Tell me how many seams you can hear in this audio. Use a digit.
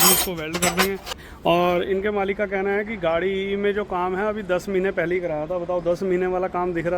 1